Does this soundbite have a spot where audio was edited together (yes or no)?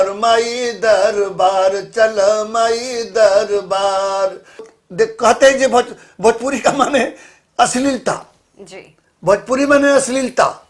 yes